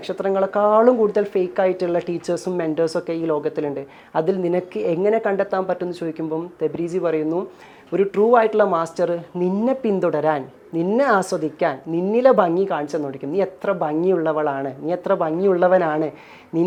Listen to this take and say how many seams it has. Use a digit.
0